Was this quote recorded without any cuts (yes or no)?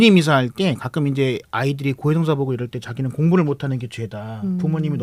yes